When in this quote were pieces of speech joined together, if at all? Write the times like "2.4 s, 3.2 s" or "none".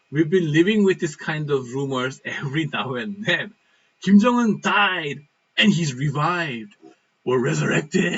none